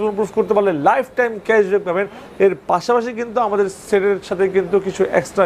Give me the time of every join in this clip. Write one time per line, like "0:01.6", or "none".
none

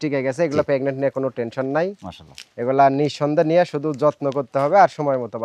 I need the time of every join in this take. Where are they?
none

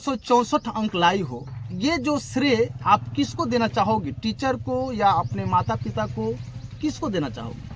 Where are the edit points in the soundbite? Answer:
none

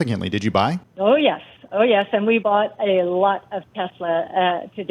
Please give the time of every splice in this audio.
0:00.9
0:02.4

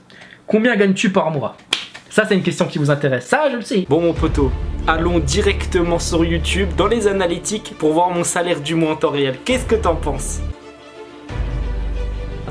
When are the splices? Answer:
0:03.9
0:10.5

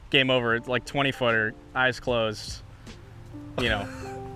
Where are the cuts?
none

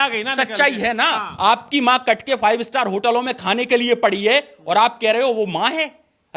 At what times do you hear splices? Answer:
0:01.3

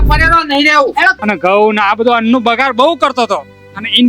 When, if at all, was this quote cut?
0:01.1

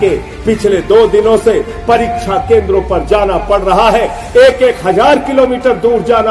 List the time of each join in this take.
none

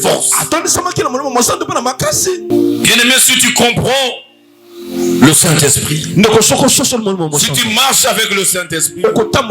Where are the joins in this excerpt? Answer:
0:02.5

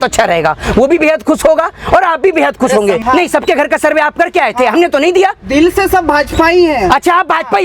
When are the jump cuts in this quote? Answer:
0:03.0

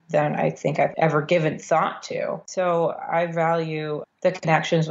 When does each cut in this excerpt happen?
0:00.9
0:02.4

